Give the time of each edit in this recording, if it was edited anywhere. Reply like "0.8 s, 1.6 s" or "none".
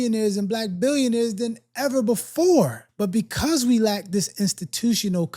2.8 s